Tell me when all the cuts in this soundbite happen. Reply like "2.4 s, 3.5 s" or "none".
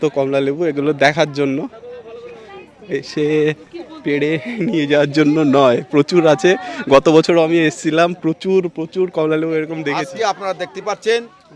9.8 s